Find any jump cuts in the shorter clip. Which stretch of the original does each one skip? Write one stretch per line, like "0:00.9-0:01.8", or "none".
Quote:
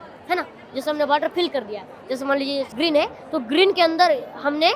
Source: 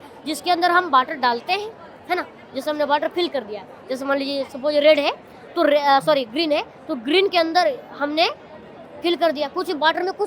0:04.5-0:06.3